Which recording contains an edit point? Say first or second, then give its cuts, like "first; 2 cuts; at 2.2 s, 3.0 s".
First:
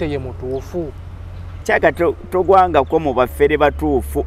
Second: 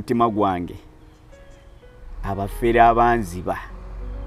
first; 1 cut; at 1.5 s